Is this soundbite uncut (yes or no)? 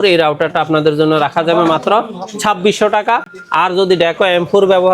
yes